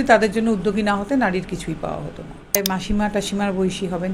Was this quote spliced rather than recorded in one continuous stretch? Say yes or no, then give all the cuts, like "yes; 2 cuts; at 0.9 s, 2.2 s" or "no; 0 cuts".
yes; 1 cut; at 2.6 s